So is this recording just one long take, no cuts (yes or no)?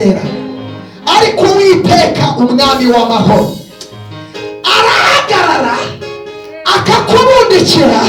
yes